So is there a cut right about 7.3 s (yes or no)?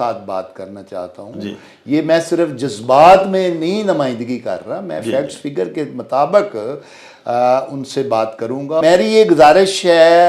no